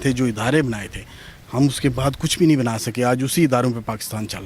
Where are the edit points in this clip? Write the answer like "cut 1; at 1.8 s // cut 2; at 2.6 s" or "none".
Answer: none